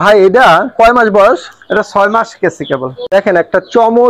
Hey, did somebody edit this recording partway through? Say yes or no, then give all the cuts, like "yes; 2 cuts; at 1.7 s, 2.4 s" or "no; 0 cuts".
yes; 1 cut; at 2.9 s